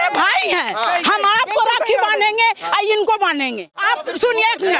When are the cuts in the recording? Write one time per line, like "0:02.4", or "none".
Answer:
0:03.8